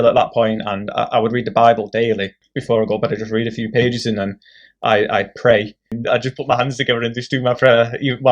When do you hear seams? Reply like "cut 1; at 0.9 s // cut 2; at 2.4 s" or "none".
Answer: cut 1; at 2.5 s // cut 2; at 5.9 s